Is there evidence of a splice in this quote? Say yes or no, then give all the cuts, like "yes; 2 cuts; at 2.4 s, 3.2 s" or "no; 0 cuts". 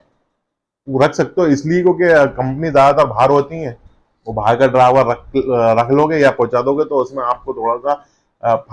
no; 0 cuts